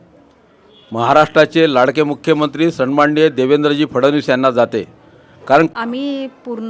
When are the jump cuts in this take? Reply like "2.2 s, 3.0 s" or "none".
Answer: 5.7 s